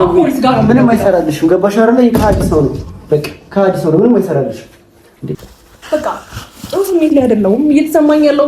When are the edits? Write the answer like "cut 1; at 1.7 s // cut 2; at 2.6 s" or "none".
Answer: cut 1; at 5.5 s